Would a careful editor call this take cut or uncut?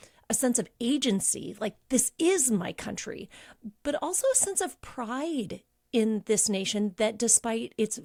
uncut